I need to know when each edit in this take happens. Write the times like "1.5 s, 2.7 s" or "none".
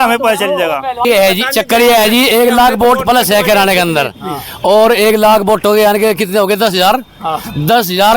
1.0 s